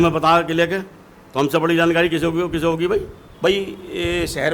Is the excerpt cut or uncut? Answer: cut